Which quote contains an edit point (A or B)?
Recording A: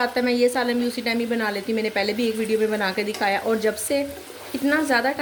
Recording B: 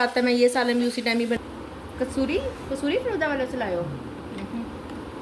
B